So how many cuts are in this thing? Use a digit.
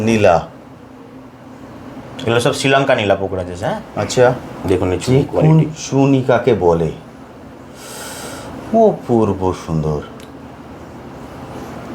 1